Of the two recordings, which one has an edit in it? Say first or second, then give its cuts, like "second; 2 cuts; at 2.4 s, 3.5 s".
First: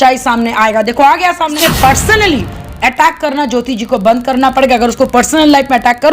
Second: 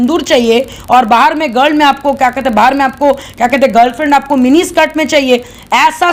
first; 1 cut; at 1.6 s